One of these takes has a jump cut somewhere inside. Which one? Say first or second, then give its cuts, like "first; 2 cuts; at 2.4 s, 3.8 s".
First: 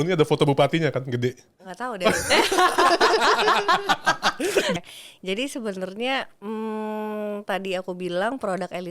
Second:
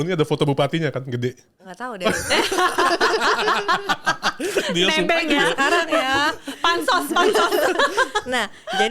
first; 1 cut; at 4.8 s